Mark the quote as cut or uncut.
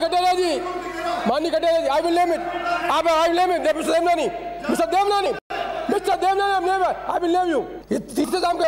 cut